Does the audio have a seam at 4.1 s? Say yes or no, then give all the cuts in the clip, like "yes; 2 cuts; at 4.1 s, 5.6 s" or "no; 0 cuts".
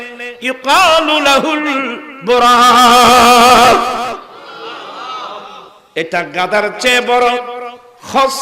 no; 1 cut; at 5.6 s